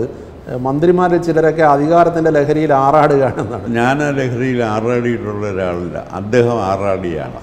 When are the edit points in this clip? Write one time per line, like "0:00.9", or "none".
0:03.6